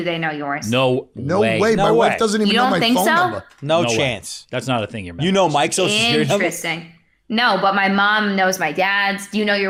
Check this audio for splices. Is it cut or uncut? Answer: uncut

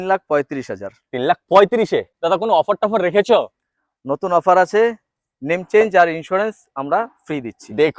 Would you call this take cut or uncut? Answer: cut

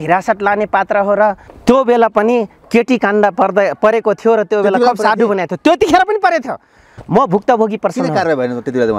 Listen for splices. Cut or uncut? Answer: cut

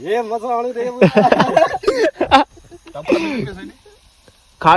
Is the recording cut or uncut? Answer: uncut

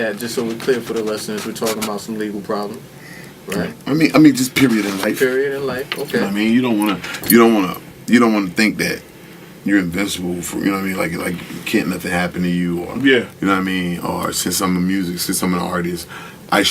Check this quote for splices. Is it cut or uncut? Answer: cut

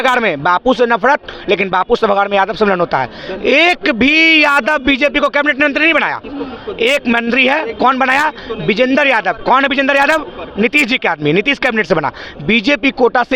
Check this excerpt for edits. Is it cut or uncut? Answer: uncut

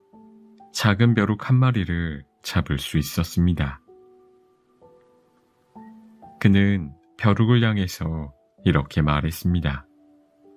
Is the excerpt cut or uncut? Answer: uncut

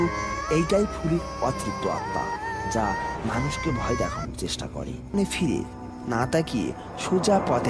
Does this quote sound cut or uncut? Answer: cut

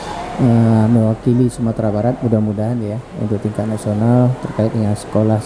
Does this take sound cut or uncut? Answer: uncut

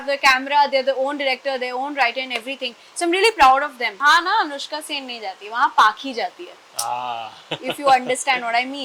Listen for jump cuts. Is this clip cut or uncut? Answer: cut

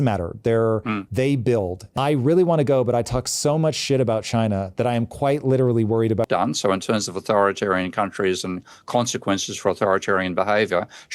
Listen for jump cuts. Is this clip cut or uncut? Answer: cut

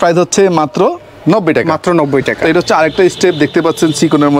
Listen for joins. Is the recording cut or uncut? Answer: cut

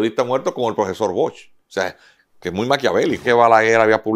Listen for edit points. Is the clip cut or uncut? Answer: cut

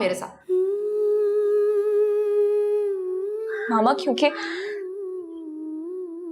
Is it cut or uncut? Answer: uncut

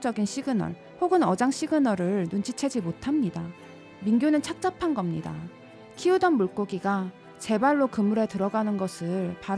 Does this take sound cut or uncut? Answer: cut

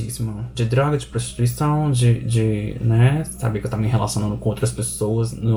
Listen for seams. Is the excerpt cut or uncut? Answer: uncut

